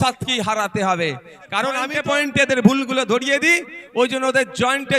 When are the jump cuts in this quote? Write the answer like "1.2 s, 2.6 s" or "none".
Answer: 1.9 s